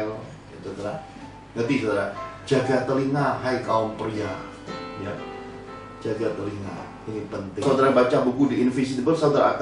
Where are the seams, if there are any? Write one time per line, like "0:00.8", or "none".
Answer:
0:07.9